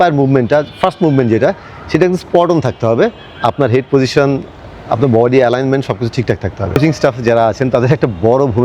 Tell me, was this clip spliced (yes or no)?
yes